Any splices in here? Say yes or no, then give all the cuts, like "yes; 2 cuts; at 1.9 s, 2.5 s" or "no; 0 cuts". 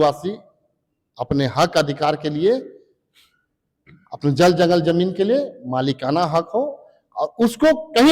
no; 0 cuts